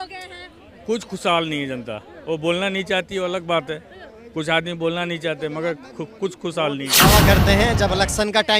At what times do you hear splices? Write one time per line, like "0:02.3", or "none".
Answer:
0:07.0